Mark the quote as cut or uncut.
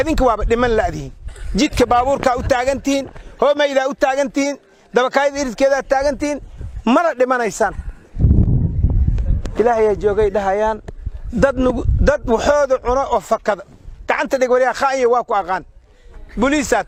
uncut